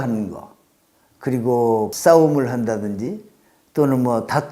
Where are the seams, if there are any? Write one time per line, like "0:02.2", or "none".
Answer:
0:01.9